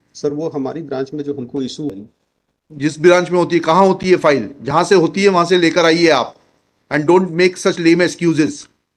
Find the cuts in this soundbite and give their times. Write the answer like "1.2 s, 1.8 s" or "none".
1.9 s